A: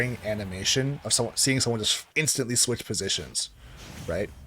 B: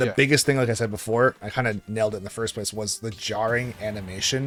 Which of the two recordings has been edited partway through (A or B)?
A